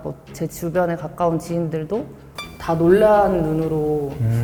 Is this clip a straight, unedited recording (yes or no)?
yes